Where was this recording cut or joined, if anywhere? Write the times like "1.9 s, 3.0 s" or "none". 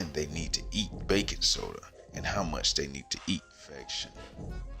3.4 s